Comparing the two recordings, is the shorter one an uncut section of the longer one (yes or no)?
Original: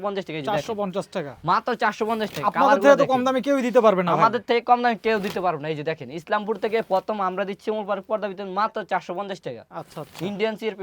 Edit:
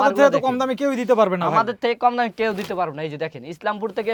yes